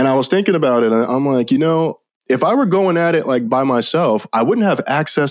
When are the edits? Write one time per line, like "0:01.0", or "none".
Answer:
0:01.1
0:03.5